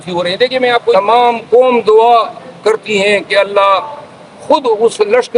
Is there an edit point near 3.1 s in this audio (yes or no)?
no